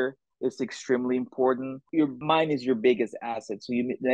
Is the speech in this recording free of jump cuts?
no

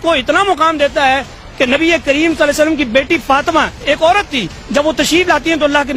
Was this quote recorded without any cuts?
yes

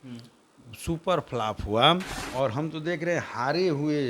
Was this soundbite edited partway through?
yes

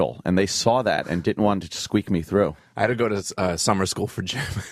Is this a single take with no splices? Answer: yes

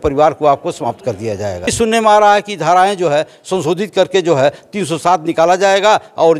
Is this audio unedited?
no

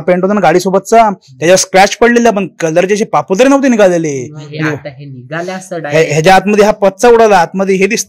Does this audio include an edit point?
no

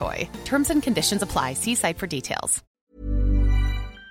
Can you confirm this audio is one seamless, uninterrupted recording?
no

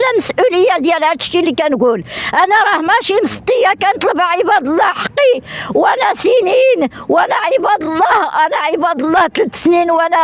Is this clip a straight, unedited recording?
yes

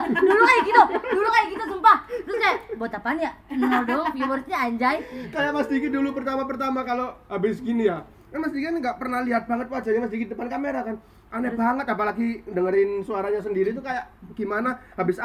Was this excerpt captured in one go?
yes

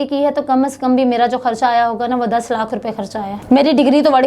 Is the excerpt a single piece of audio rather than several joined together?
no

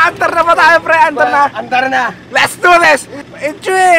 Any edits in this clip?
yes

